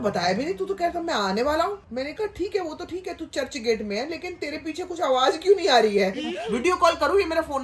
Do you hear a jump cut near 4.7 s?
no; 2 cuts; at 1.8 s, 6.5 s

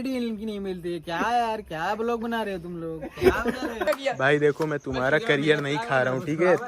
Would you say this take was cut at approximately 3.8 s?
yes; 1 cut; at 3.8 s

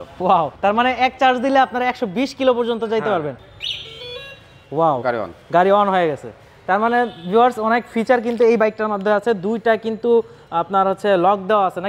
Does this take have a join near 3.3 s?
yes; 1 cut; at 3.3 s

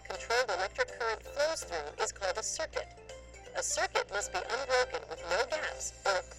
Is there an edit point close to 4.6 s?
yes; 1 cut; at 4.6 s

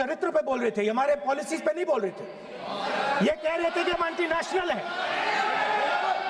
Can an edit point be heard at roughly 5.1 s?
no; 0 cuts

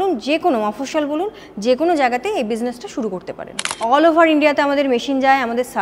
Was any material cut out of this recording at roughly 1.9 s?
no; 1 cut; at 3.8 s

